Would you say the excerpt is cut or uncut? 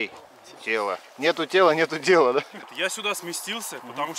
cut